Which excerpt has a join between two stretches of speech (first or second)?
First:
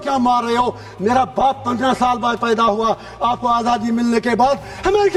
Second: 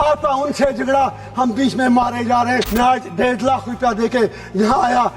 second